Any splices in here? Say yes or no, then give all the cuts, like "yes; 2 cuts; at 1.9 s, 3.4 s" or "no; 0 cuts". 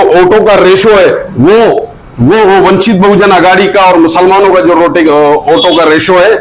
no; 0 cuts